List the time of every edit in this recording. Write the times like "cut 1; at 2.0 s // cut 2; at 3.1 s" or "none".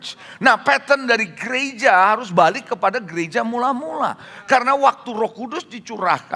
none